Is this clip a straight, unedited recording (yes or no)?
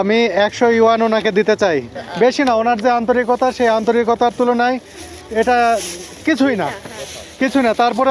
no